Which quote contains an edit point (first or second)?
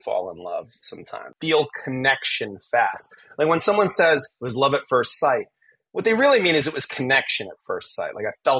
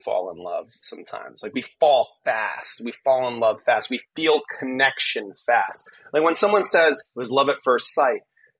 first